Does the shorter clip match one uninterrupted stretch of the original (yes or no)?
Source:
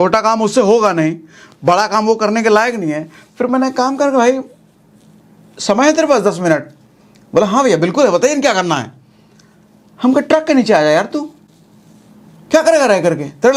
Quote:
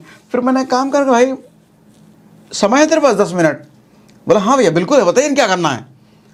yes